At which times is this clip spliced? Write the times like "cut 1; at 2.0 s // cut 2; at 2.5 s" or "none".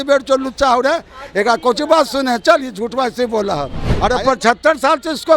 cut 1; at 3.8 s